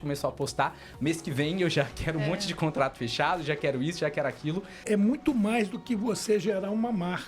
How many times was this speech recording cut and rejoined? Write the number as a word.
one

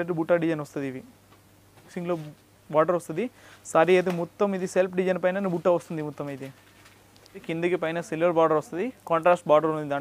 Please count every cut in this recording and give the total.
two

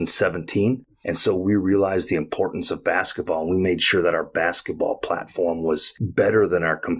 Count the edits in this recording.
two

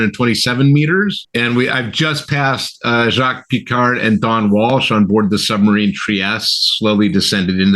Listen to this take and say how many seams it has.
one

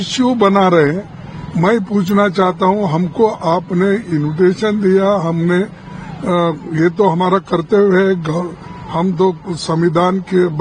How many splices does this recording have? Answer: zero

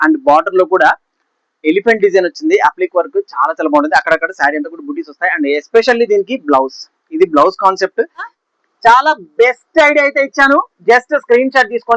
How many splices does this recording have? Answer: one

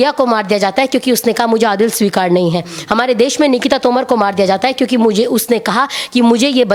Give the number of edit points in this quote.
zero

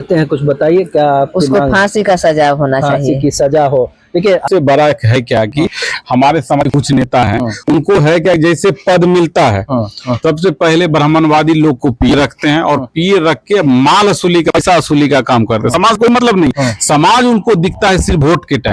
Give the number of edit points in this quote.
one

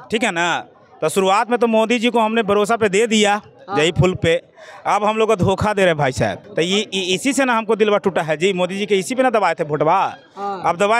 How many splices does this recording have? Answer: one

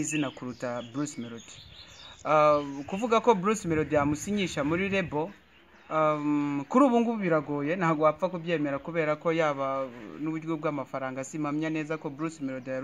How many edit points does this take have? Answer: zero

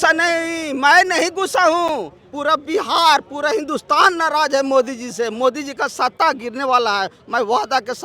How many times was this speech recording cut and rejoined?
zero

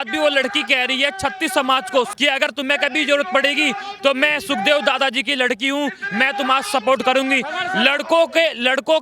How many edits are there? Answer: one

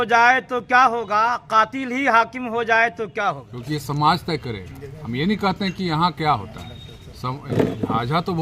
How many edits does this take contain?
one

